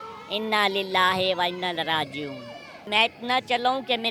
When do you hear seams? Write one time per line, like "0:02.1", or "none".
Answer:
0:02.9

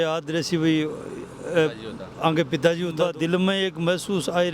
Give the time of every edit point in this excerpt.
0:03.0

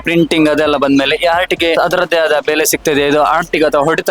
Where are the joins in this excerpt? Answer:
0:01.8

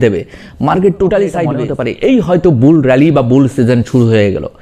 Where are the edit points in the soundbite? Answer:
0:01.7

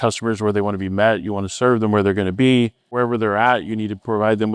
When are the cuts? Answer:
0:02.9

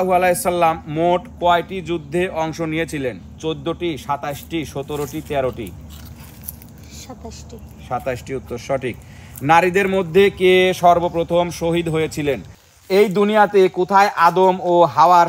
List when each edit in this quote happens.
0:12.5

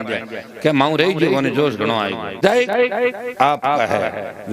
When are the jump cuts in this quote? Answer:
0:02.4

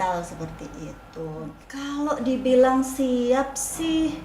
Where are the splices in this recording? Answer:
0:01.6

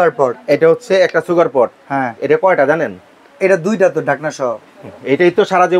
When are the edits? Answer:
none

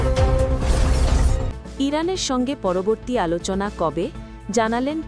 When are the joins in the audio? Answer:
0:01.4

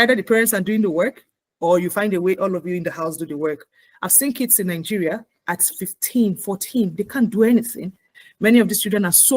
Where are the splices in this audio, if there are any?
0:08.1

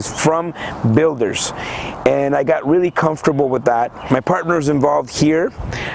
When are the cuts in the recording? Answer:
0:04.0

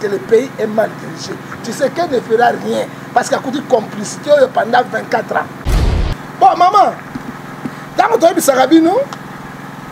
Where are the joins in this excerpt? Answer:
0:05.7

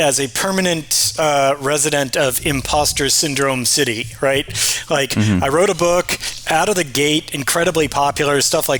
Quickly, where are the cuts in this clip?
none

